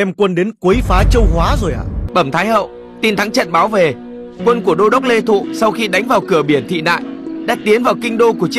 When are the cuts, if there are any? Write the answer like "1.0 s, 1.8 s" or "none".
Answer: 1.9 s

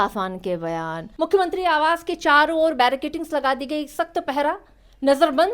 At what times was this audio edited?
1.0 s

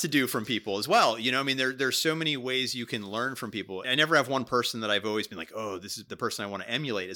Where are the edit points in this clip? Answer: 3.9 s, 6.0 s

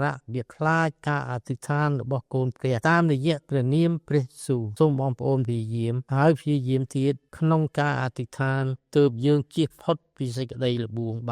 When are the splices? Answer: 2.8 s, 4.7 s, 6.0 s, 7.3 s

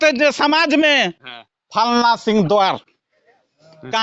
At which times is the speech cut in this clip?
none

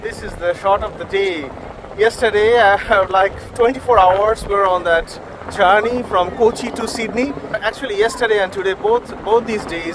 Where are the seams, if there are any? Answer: none

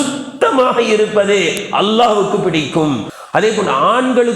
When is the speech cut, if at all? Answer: 3.1 s

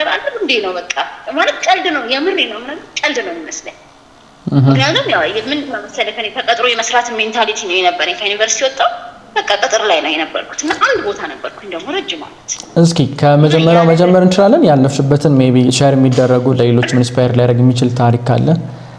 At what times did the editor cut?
none

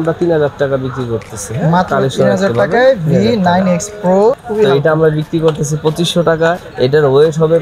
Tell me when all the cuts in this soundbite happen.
4.4 s, 6.7 s

